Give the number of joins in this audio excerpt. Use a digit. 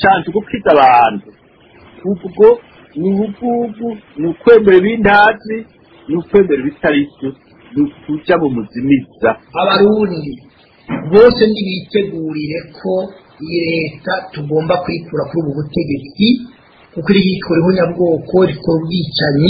1